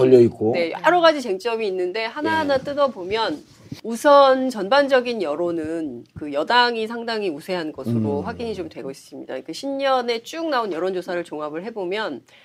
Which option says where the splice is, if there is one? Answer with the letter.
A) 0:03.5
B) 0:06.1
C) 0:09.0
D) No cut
D